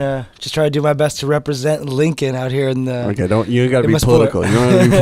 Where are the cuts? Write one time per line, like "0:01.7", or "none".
none